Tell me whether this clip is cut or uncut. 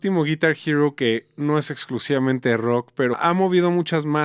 cut